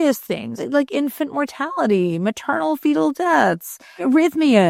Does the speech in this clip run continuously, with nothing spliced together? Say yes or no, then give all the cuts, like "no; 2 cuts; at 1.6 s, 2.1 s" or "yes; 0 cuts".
yes; 0 cuts